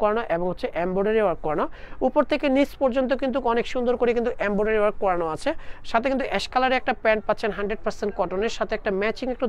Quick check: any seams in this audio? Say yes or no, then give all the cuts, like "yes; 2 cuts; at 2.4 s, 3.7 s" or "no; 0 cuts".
no; 0 cuts